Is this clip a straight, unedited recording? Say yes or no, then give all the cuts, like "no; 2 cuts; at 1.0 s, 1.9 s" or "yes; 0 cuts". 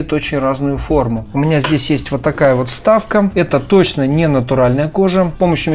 yes; 0 cuts